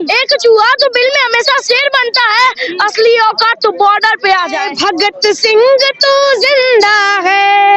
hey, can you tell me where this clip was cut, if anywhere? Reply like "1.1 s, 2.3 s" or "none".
4.7 s